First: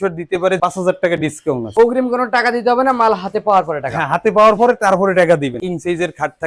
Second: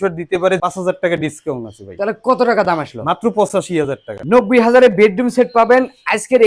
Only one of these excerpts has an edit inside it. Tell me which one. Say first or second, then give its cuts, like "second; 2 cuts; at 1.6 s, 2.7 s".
first; 2 cuts; at 1.6 s, 5.6 s